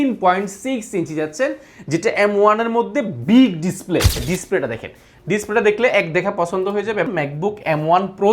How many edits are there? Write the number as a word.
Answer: two